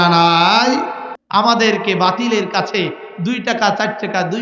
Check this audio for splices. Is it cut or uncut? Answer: cut